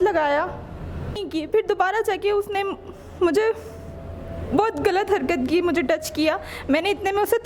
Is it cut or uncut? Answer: cut